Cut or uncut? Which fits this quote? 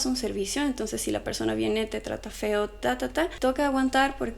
cut